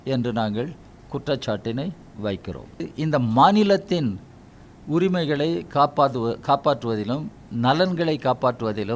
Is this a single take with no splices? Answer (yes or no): no